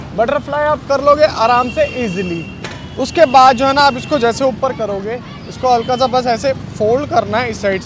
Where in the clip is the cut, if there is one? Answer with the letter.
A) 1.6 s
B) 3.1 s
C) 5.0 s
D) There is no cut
D